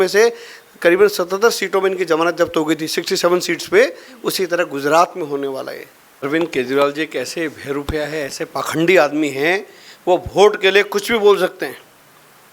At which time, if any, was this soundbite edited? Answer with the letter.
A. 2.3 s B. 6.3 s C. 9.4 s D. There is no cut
B